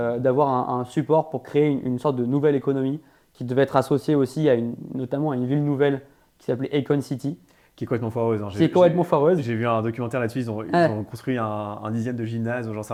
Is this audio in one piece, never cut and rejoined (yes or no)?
yes